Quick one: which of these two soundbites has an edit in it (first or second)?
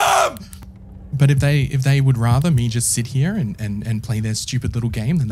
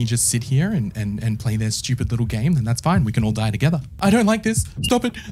second